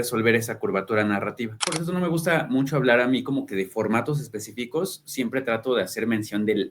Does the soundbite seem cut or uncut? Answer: cut